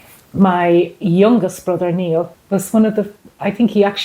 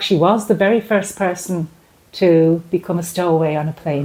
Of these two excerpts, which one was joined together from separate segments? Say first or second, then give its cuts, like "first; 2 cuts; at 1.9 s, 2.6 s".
first; 1 cut; at 2.4 s